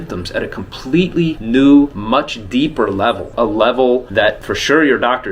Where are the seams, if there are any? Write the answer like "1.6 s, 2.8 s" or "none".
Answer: 1.4 s, 2.0 s, 3.3 s, 4.3 s